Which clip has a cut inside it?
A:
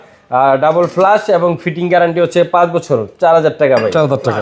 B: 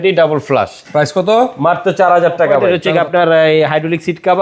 B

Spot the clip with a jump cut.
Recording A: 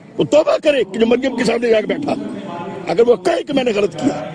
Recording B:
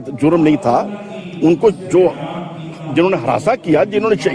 A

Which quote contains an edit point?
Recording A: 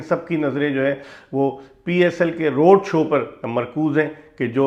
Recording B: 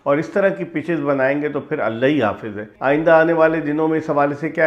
B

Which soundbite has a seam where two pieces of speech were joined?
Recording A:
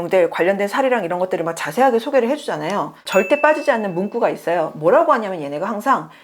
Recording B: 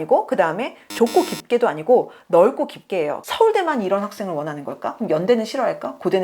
B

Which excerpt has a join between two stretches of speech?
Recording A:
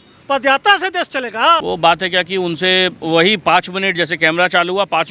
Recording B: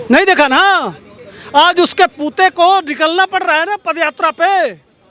A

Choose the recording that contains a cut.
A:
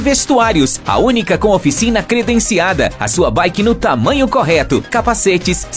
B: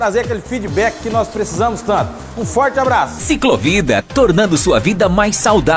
B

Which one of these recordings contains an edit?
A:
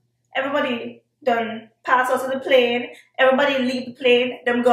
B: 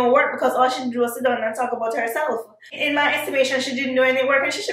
B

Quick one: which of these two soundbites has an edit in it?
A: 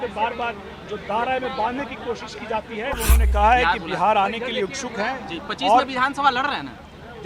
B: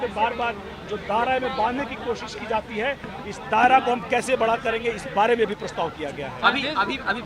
A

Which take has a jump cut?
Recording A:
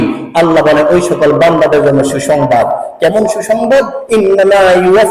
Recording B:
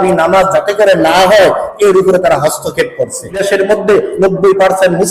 B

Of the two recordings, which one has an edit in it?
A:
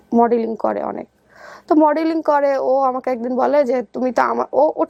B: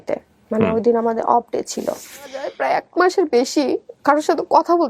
B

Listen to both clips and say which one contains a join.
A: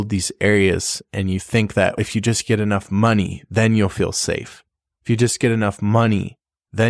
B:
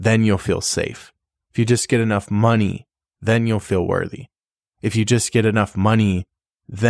A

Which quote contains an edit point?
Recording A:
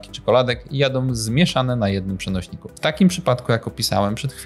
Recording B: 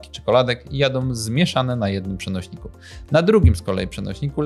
A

